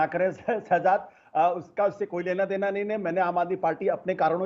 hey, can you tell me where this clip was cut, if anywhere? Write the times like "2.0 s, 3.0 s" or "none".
none